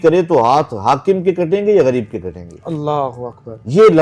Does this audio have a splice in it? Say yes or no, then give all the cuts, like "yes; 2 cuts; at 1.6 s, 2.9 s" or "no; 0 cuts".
no; 0 cuts